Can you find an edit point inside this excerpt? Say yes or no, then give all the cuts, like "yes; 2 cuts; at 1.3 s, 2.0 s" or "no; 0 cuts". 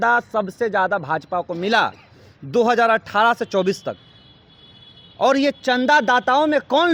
no; 0 cuts